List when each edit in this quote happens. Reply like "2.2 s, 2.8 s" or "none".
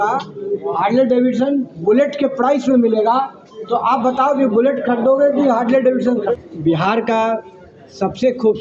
6.3 s